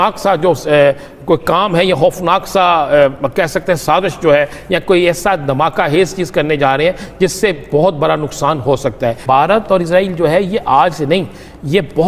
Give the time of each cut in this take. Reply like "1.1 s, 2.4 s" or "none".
9.2 s